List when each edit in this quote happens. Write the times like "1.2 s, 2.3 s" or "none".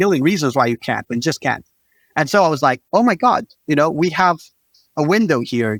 none